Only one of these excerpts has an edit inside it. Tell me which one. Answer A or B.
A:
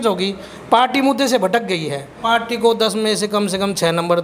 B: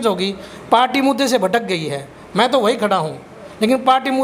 A